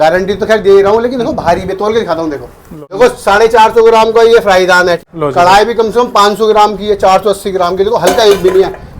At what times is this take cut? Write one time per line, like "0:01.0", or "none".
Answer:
0:03.0
0:05.0